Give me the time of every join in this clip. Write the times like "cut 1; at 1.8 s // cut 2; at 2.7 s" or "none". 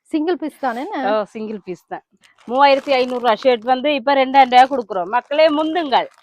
cut 1; at 2.3 s